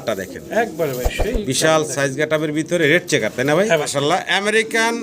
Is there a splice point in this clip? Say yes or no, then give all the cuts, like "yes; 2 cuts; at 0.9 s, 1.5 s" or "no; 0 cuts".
yes; 1 cut; at 3.9 s